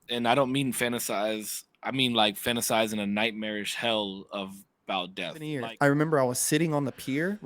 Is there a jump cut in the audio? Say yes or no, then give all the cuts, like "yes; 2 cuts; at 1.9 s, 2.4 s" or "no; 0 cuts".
yes; 1 cut; at 5.6 s